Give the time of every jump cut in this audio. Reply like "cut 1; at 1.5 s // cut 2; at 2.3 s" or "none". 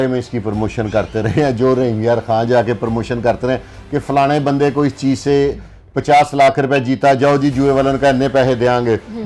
none